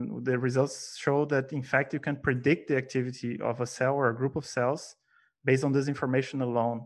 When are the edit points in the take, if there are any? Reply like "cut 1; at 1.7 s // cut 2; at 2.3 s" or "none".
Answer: none